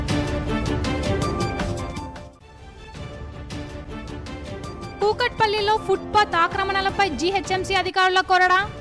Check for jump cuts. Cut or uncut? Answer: uncut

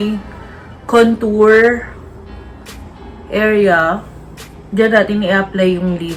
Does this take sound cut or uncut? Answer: uncut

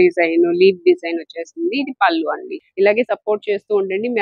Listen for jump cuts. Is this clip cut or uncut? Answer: cut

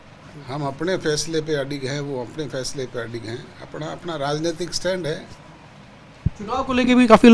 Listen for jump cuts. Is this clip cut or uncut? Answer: uncut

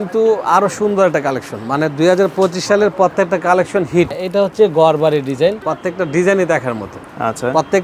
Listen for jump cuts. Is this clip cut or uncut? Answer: cut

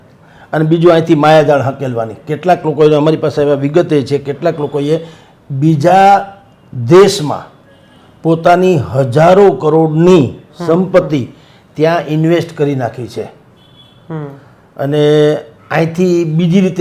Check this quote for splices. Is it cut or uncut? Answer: uncut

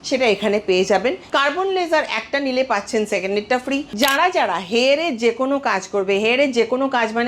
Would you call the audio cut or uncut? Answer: cut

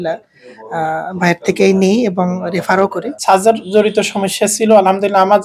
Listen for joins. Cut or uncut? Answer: cut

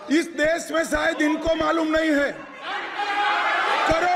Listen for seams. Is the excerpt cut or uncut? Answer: uncut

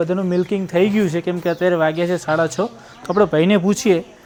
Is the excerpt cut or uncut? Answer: uncut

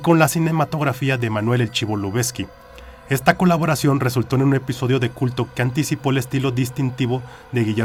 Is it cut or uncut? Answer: uncut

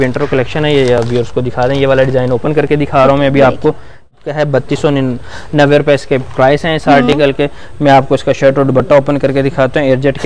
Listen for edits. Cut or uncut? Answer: cut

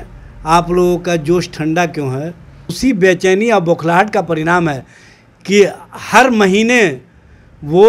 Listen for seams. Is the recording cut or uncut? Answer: cut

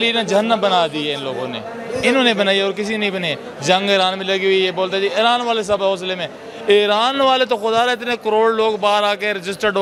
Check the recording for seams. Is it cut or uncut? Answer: uncut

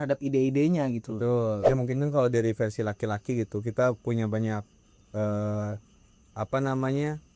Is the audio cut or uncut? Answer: cut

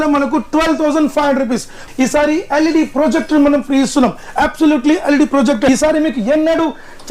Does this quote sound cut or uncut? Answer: cut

